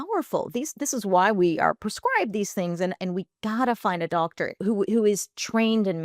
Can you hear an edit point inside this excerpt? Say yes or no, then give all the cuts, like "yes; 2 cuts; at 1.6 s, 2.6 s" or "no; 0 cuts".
yes; 2 cuts; at 3.0 s, 4.6 s